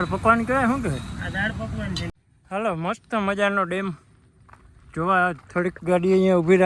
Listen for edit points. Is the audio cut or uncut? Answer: cut